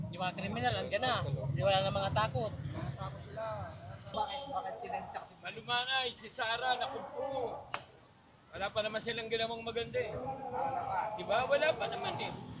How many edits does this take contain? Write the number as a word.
one